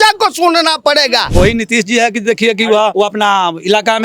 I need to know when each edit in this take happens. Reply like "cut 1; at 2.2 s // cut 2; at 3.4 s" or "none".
cut 1; at 1.3 s // cut 2; at 2.9 s